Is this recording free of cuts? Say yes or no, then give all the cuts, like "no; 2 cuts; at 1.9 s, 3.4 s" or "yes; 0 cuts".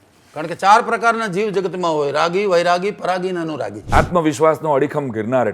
no; 1 cut; at 3.7 s